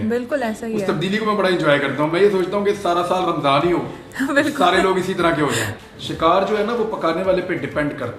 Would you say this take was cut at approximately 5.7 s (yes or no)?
yes